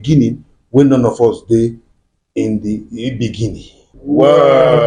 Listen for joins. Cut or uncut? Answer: cut